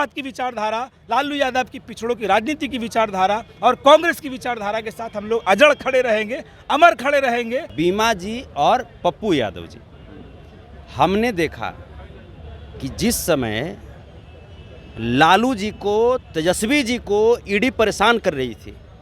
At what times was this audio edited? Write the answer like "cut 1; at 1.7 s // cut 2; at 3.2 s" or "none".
cut 1; at 7.7 s